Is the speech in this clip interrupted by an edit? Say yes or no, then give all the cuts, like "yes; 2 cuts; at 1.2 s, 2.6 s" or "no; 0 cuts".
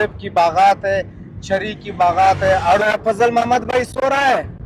yes; 1 cut; at 2.8 s